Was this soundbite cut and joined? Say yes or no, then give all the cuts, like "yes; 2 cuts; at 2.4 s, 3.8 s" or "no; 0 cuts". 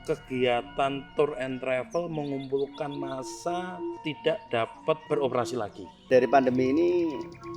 yes; 3 cuts; at 4.0 s, 5.0 s, 6.1 s